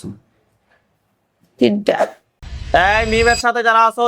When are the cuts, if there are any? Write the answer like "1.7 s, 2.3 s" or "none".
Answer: 2.2 s